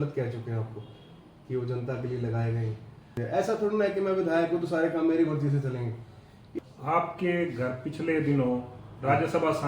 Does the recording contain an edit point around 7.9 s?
no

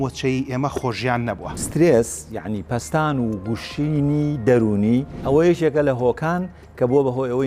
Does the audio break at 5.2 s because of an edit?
yes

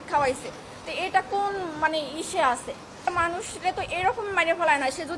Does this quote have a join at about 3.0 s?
yes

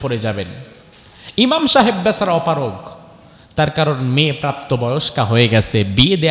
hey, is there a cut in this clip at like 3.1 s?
no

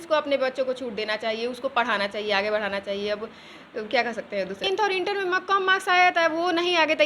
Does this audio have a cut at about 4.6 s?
yes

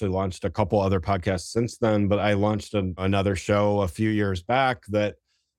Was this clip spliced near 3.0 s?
yes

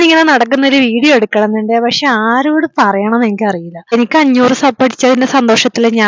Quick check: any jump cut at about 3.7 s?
yes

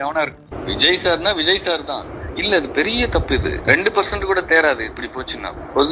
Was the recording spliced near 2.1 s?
yes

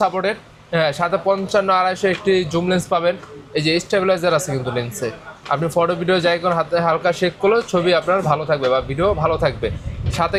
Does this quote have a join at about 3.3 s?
no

